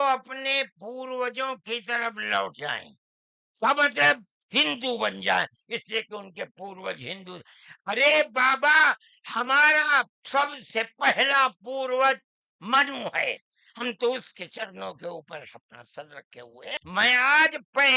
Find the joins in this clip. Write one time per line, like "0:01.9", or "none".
0:16.8